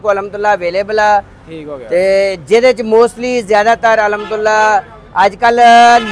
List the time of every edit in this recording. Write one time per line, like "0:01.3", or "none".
none